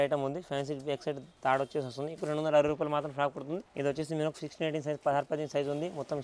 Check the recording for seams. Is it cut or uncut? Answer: cut